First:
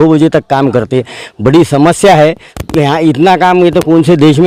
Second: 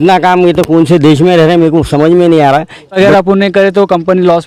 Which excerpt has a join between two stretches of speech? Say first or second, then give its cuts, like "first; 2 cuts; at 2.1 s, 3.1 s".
second; 1 cut; at 3.0 s